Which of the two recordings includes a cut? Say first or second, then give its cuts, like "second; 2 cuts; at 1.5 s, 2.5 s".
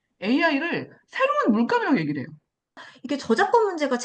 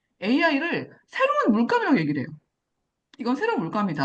first; 1 cut; at 2.9 s